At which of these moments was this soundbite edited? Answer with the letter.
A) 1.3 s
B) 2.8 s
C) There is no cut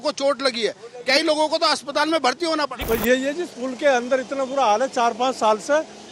B